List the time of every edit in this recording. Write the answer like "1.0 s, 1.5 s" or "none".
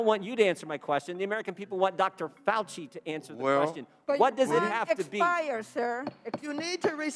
none